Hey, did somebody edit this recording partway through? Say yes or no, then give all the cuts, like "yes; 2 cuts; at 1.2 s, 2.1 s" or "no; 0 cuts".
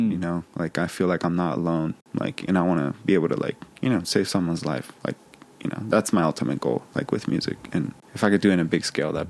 yes; 2 cuts; at 2.0 s, 8.0 s